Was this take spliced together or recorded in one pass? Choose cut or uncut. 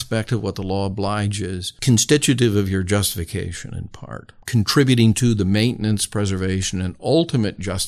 cut